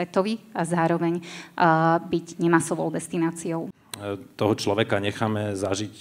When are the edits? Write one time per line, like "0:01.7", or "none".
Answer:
0:03.9